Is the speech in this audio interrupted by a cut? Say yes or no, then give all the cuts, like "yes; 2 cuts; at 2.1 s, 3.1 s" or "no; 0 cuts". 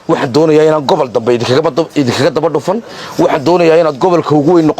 no; 0 cuts